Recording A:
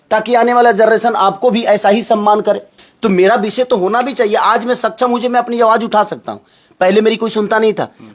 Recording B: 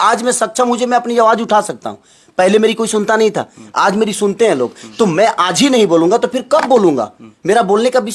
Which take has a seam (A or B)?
A